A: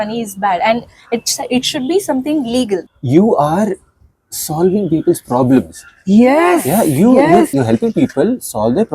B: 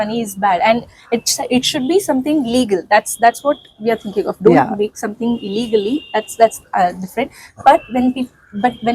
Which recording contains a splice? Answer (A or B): A